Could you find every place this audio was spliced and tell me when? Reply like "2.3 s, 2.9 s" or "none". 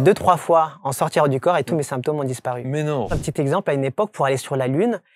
3.2 s